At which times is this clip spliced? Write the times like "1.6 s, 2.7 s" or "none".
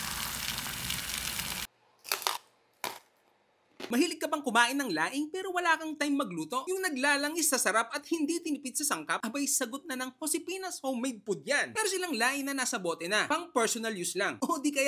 1.6 s